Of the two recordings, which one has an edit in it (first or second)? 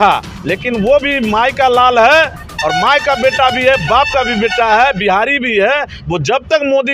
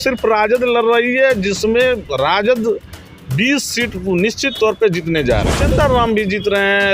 second